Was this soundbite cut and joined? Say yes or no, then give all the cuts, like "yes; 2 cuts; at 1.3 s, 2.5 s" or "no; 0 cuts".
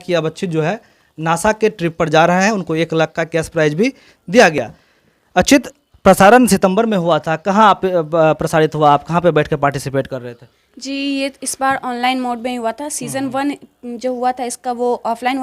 no; 0 cuts